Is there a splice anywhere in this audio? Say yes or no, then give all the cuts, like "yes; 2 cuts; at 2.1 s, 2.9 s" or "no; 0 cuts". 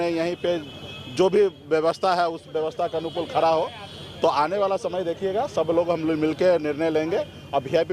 no; 0 cuts